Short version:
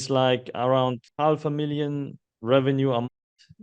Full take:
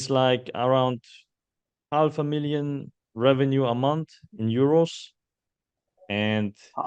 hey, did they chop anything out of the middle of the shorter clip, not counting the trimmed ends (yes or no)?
yes